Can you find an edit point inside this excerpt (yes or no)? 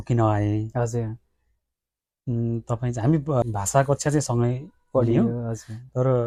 no